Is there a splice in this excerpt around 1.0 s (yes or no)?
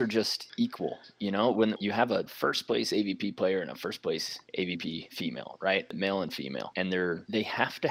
no